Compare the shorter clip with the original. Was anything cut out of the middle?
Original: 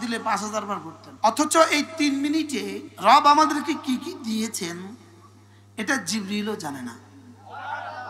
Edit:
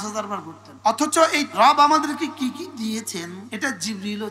yes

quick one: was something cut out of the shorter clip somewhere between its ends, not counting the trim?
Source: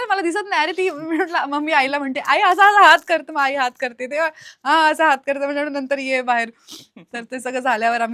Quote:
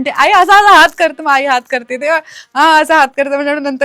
no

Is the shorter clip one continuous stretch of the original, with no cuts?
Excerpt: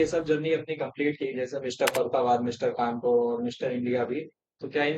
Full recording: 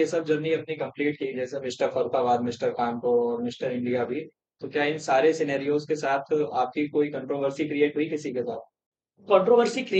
yes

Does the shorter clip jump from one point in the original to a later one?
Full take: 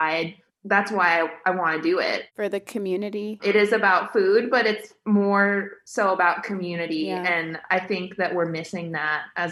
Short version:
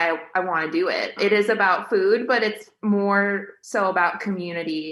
yes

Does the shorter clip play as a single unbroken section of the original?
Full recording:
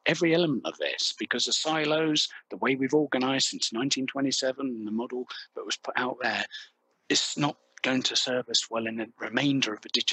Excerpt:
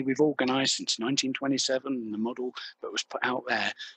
yes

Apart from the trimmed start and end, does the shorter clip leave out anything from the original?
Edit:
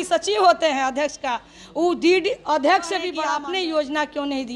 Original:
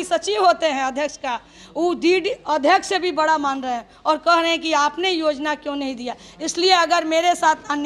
yes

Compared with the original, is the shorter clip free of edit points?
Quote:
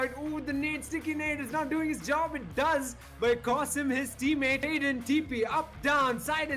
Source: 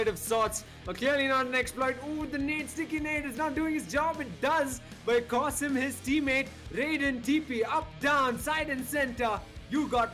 no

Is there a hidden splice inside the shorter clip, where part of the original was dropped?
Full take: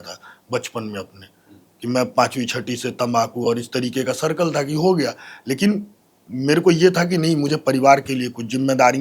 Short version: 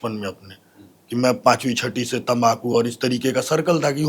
no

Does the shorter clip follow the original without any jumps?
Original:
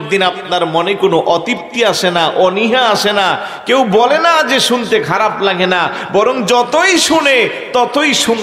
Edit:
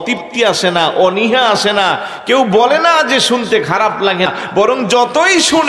no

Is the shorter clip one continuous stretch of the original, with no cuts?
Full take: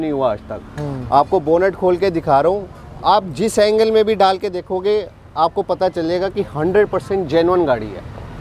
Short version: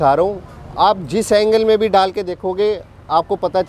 yes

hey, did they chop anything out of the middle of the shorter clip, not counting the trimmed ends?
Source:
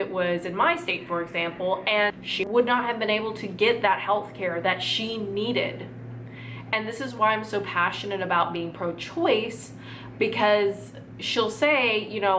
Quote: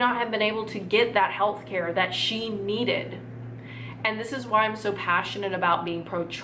no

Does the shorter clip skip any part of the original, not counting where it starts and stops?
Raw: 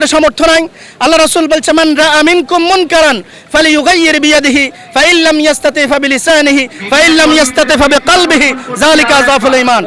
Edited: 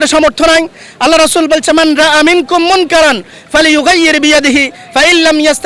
no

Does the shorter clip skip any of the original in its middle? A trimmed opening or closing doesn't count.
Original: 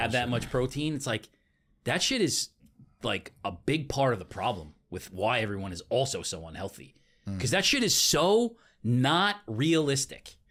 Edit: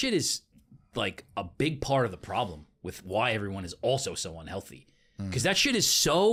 no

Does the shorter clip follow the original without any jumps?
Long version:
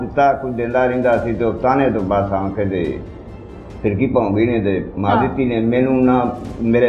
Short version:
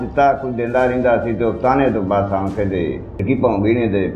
no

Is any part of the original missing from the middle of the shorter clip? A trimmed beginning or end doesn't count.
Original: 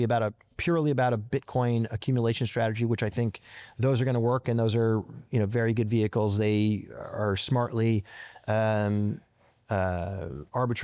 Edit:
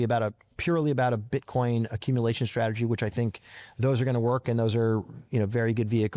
no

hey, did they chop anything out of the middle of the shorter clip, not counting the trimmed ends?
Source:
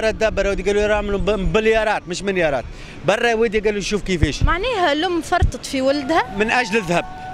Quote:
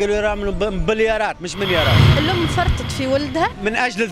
yes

